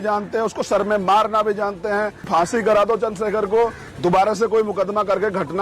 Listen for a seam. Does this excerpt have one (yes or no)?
yes